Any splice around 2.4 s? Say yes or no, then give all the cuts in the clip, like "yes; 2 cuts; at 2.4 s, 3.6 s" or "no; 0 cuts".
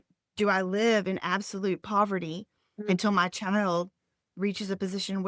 no; 0 cuts